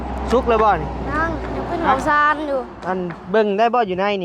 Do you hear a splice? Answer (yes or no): yes